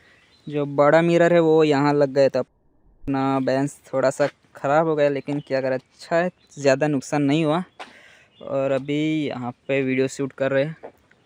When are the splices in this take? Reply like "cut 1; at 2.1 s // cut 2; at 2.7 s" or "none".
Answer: none